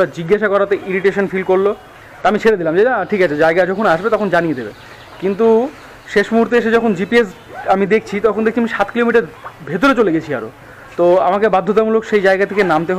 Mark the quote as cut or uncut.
uncut